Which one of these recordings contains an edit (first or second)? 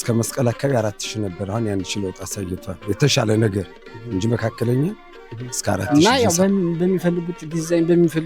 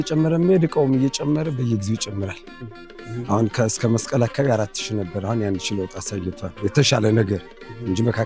first